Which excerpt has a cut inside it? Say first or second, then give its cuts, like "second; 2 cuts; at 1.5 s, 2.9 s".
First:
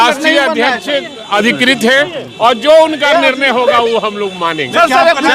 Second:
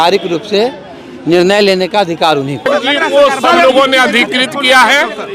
second; 1 cut; at 2.7 s